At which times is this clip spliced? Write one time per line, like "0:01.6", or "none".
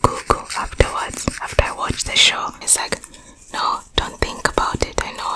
0:02.6